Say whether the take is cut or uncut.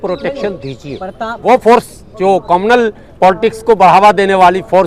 cut